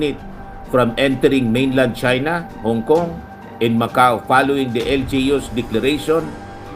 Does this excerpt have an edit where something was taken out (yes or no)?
no